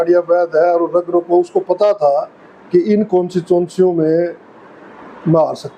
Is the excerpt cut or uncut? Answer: uncut